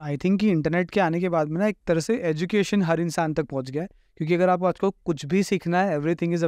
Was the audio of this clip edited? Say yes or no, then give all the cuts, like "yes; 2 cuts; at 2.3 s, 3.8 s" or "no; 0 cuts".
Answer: no; 0 cuts